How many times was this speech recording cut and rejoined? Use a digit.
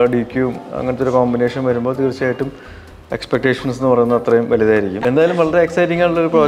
1